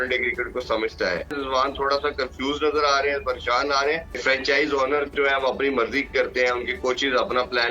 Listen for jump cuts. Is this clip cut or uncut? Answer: cut